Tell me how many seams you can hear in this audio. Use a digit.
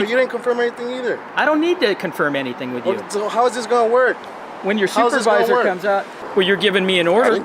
1